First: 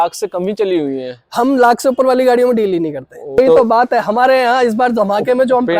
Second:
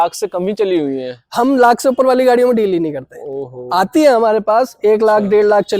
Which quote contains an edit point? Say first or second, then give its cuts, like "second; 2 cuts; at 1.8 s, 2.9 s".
first; 1 cut; at 3.4 s